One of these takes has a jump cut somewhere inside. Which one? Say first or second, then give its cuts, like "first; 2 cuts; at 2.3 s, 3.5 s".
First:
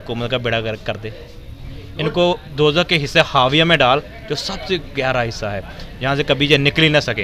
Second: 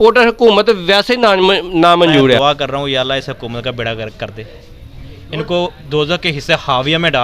second; 1 cut; at 2.4 s